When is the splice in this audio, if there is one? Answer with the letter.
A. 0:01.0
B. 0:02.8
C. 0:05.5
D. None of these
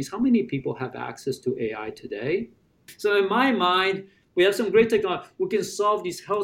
B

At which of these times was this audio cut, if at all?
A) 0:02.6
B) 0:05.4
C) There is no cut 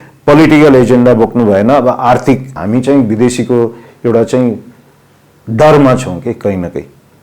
A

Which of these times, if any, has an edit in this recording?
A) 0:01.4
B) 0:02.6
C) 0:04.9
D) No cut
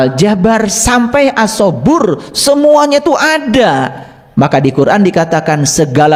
D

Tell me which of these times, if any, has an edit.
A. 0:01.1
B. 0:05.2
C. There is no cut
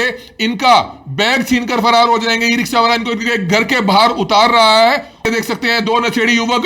B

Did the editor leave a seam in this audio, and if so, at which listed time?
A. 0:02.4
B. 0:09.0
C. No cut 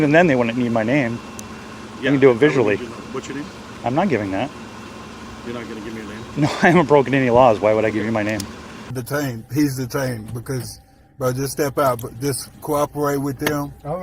B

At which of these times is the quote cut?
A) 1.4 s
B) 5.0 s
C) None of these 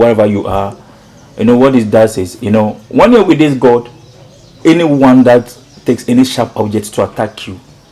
C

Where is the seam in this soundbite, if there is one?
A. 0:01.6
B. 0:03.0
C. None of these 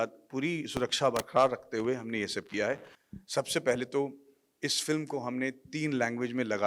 B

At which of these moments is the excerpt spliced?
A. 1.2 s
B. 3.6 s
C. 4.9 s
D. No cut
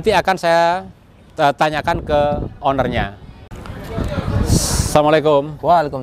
B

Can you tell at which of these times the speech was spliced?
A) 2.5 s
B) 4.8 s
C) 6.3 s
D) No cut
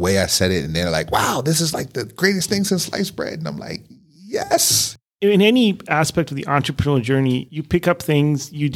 B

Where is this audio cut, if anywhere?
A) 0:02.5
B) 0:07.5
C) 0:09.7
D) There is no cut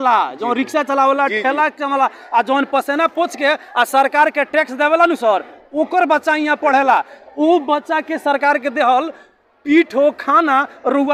D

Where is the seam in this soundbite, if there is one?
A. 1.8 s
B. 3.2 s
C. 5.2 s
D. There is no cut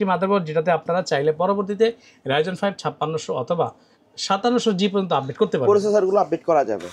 D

